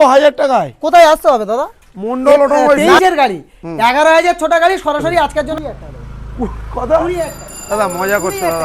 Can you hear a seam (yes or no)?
yes